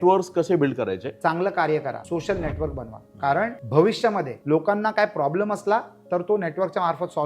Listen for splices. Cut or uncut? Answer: cut